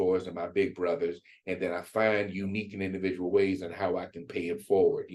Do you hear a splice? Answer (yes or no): no